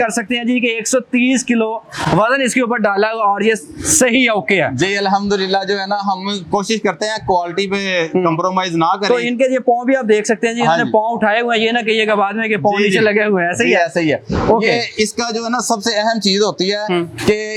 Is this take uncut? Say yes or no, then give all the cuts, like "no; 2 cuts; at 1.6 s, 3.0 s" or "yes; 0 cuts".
yes; 0 cuts